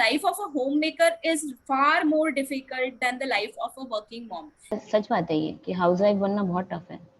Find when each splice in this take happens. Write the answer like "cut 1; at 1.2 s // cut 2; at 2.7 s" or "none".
cut 1; at 4.7 s